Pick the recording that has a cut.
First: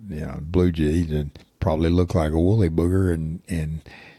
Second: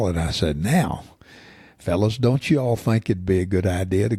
first; 1 cut; at 1.4 s

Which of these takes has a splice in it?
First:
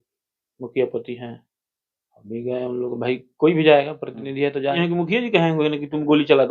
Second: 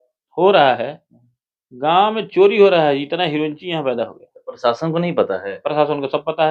first; 1 cut; at 4.8 s

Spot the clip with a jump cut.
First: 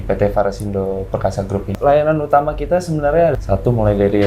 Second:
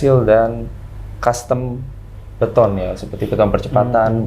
first; 1 cut; at 1.7 s

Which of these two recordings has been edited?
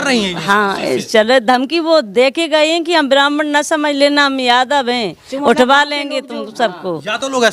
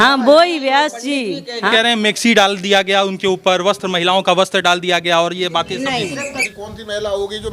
second; 2 cuts; at 1.7 s, 6.3 s

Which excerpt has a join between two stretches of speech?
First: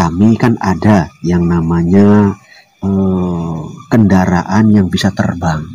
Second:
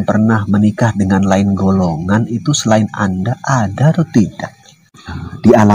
second; 1 cut; at 4.8 s

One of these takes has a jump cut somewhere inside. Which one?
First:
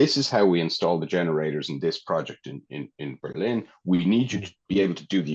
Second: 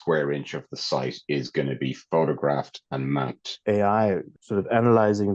second; 2 cuts; at 3.4 s, 4.3 s

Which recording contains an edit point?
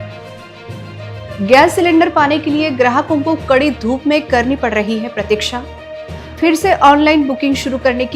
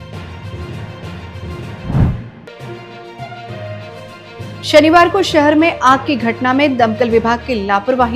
second; 1 cut; at 2.3 s

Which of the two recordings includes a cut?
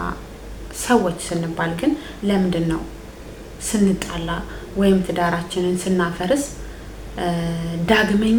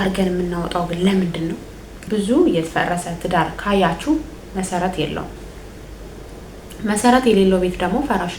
second; 1 cut; at 2.0 s

